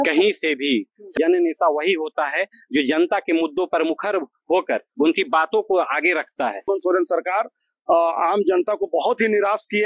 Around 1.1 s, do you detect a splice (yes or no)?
yes